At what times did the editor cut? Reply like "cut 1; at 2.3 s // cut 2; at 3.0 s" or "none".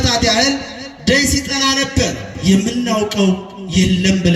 cut 1; at 2.3 s